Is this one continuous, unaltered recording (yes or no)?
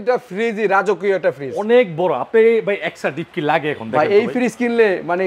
yes